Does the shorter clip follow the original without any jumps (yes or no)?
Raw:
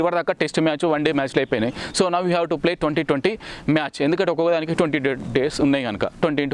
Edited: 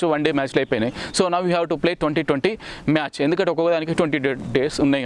yes